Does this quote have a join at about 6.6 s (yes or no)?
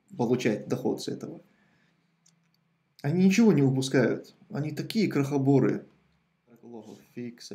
yes